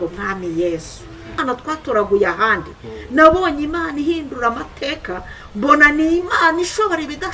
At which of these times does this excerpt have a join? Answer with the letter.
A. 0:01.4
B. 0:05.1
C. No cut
A